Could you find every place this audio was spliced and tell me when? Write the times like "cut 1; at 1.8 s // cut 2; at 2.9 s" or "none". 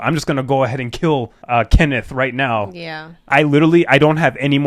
cut 1; at 3.1 s